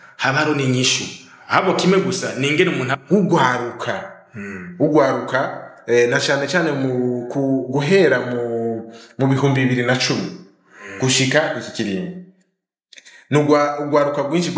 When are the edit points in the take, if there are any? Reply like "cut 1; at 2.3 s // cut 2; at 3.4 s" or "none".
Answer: cut 1; at 2.9 s